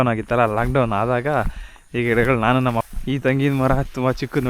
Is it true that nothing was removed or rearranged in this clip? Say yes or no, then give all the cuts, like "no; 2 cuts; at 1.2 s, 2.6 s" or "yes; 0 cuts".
no; 1 cut; at 2.9 s